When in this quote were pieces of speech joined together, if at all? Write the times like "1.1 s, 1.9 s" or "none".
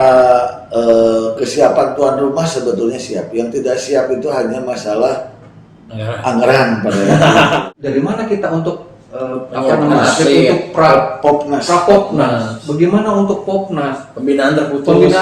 7.6 s